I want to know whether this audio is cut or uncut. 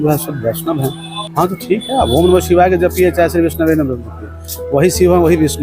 cut